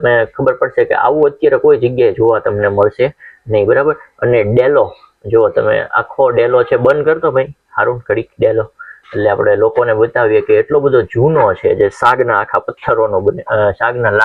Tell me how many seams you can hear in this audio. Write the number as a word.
zero